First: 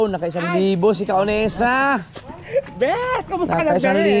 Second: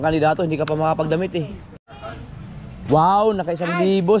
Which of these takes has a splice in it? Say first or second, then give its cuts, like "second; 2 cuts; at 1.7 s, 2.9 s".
second; 1 cut; at 1.7 s